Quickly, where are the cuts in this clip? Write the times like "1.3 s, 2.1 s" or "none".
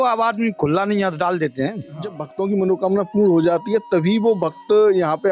2.2 s